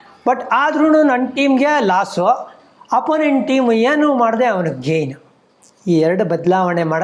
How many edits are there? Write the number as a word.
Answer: zero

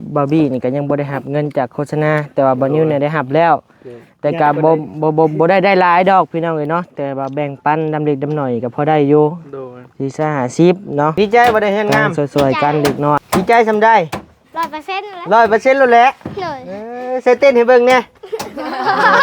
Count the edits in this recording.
three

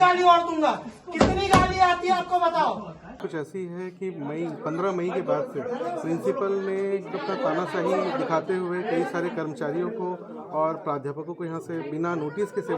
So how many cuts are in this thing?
one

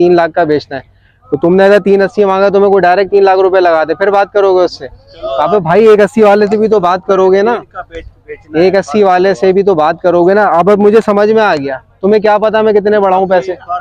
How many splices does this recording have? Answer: zero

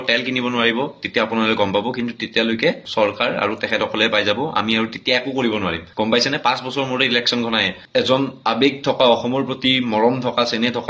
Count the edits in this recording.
one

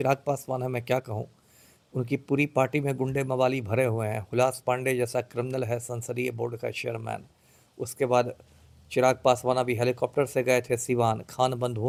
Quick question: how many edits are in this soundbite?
zero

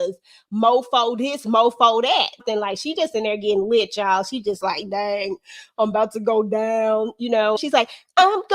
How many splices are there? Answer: two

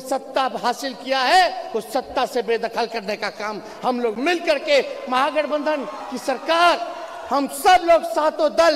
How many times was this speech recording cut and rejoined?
zero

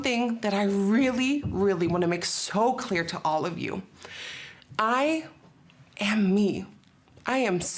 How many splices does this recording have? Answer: zero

